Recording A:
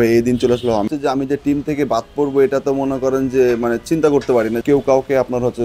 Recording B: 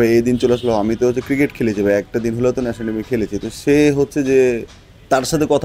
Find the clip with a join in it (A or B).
A